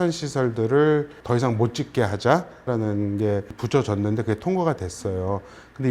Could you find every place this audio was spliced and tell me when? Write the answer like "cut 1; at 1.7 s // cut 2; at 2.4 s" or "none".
cut 1; at 1.2 s // cut 2; at 2.7 s // cut 3; at 3.6 s